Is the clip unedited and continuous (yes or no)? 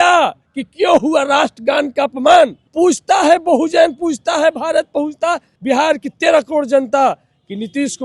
no